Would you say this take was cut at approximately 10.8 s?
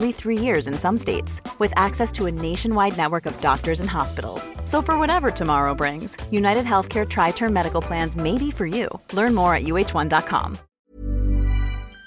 yes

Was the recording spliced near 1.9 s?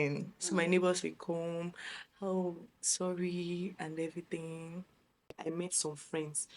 no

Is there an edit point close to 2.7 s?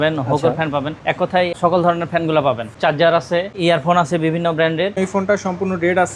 yes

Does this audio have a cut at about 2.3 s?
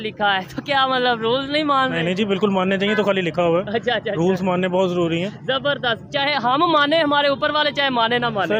no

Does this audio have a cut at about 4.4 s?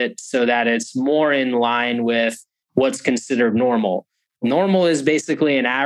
yes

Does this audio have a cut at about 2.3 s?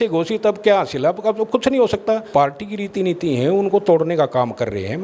yes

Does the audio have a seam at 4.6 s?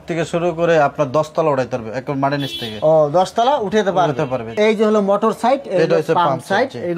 yes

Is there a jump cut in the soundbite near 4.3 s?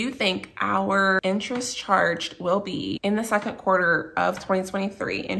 no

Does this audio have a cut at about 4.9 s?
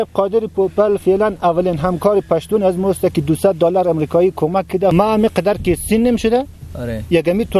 yes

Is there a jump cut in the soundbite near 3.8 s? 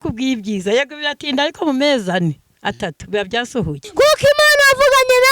yes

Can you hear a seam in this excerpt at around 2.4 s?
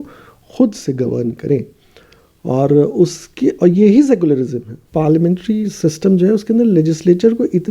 no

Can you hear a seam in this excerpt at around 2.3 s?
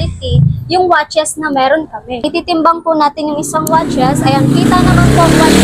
yes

